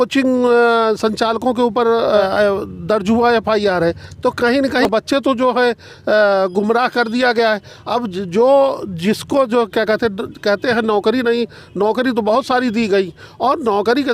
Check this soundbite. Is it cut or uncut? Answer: cut